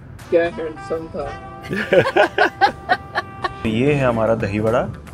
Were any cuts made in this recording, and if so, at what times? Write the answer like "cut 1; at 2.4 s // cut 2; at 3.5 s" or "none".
cut 1; at 3.6 s